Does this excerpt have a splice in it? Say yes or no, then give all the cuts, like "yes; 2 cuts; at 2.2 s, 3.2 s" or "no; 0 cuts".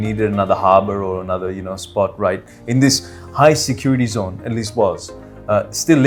no; 0 cuts